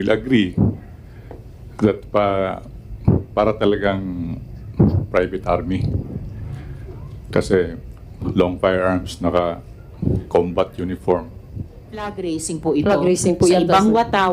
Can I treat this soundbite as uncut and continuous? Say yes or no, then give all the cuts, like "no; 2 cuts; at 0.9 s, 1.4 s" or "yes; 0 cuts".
no; 1 cut; at 12.2 s